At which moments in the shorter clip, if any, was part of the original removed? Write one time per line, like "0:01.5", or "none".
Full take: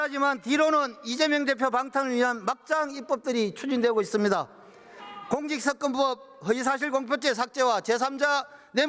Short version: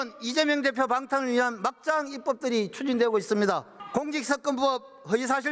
0:03.8